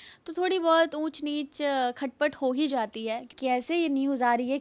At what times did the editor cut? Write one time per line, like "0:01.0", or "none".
0:03.3